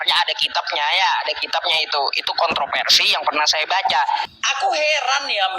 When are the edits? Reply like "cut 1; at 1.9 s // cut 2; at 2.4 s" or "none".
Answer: cut 1; at 4.2 s

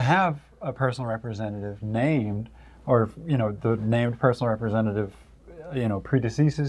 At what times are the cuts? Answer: none

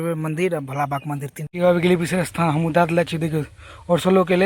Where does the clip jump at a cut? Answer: cut 1; at 1.4 s

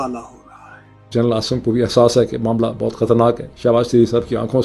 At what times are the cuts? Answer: cut 1; at 0.9 s

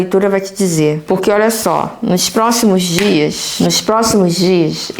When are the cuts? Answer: cut 1; at 1.0 s // cut 2; at 3.4 s

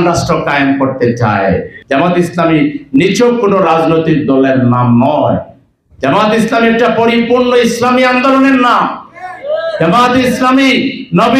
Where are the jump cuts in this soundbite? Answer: cut 1; at 1.7 s

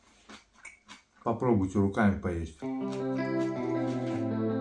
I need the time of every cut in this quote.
cut 1; at 2.5 s

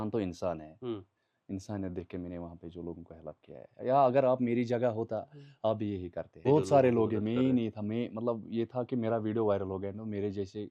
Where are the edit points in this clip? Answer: cut 1; at 6.3 s

